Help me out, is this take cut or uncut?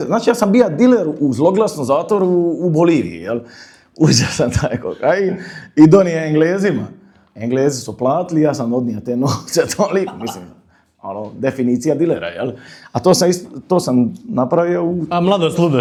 uncut